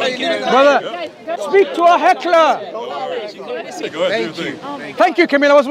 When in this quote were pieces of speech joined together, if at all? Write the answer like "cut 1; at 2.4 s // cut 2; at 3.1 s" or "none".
cut 1; at 1.4 s // cut 2; at 3.8 s